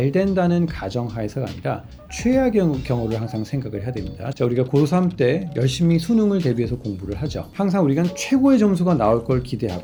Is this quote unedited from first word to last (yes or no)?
yes